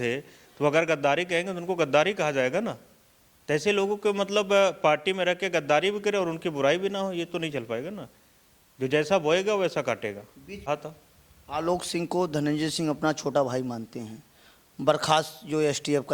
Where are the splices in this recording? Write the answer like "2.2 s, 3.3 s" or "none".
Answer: 10.7 s